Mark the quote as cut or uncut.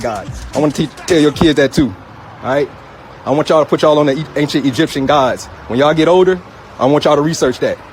uncut